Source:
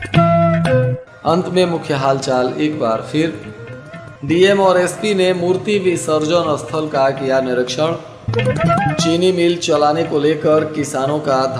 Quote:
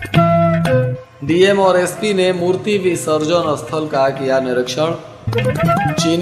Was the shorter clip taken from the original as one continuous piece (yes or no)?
no